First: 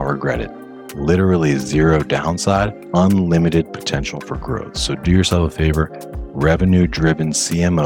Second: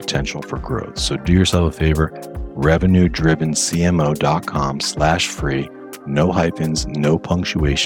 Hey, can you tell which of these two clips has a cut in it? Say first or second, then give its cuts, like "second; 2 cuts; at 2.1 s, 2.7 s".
first; 1 cut; at 2.8 s